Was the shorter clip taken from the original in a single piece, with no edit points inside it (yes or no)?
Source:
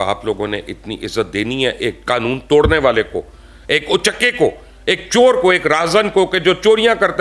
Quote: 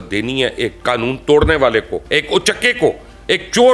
no